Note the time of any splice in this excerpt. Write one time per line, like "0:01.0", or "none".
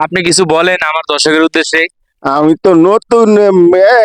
none